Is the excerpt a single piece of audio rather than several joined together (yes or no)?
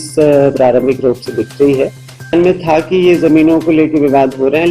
no